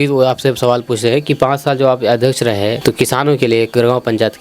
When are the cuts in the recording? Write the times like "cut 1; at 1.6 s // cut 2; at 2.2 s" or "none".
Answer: cut 1; at 2.8 s